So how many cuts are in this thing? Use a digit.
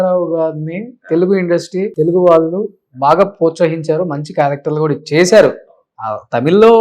1